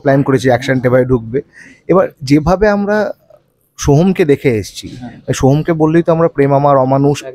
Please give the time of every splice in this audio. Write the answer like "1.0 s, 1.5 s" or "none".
none